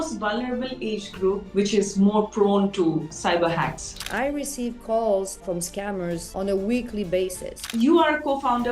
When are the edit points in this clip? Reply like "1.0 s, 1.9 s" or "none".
3.1 s, 4.0 s, 5.4 s, 7.6 s